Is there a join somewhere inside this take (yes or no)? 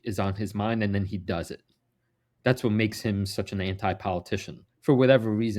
no